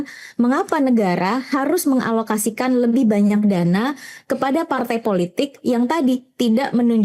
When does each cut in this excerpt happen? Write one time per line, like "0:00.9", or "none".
none

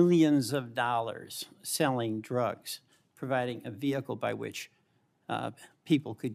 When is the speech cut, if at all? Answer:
none

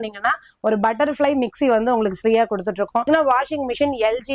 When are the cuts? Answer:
0:03.1

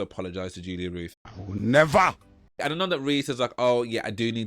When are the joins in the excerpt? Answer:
0:02.5

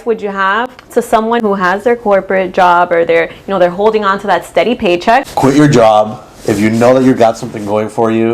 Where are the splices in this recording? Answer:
0:01.4
0:05.3

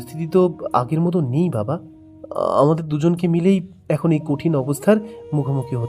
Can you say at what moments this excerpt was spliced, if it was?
none

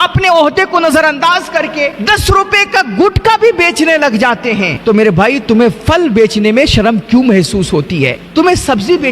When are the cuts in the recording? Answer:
0:02.0
0:08.2

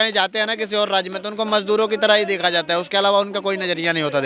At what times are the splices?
none

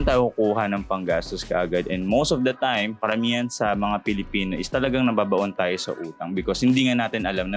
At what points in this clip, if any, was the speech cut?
none

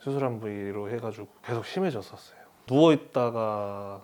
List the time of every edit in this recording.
0:02.6

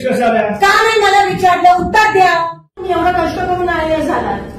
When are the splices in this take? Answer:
0:02.8

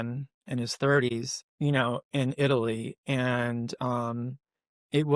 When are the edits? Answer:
0:01.1

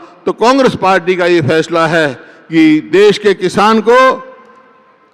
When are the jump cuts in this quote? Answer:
none

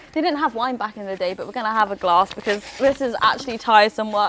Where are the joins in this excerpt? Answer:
none

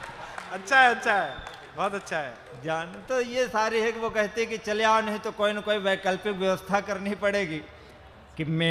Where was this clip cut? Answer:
none

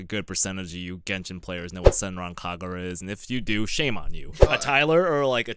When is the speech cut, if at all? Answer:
0:04.4

